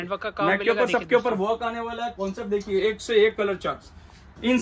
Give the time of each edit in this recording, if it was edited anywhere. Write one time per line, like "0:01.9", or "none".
none